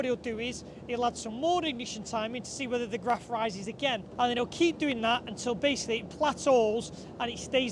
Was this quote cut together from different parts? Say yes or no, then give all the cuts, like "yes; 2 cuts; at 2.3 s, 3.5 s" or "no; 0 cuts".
yes; 1 cut; at 4.0 s